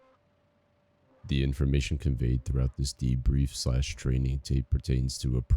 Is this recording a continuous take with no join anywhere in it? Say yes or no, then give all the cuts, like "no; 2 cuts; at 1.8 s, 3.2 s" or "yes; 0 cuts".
no; 1 cut; at 1.2 s